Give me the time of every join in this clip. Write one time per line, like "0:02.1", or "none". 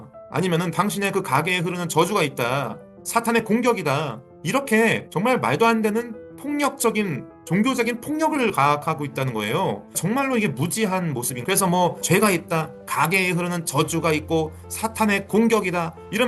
0:11.3